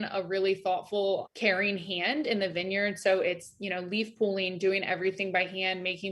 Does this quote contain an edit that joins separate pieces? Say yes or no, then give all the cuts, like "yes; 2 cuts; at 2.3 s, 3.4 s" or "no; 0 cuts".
no; 0 cuts